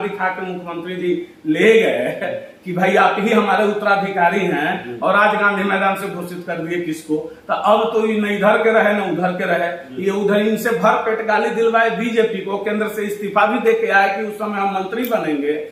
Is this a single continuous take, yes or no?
yes